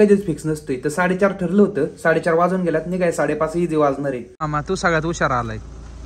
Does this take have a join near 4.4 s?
yes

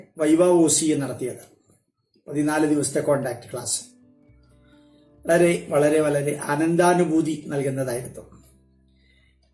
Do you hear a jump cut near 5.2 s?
no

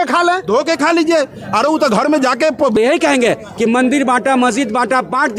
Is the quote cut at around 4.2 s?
no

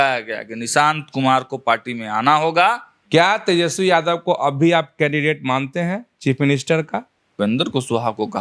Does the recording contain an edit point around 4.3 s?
no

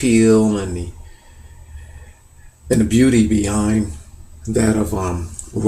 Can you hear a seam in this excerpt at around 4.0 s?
no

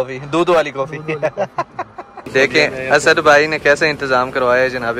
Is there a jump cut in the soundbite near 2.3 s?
yes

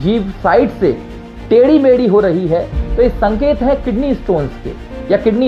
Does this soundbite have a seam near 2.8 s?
no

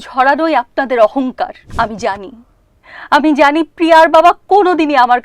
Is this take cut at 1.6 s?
yes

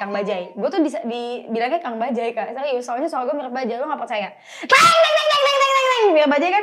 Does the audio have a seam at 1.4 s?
no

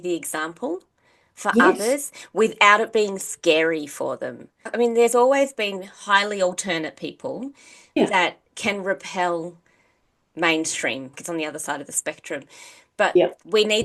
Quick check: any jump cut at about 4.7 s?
yes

